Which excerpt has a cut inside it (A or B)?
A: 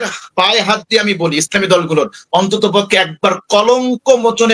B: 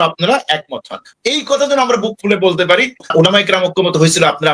B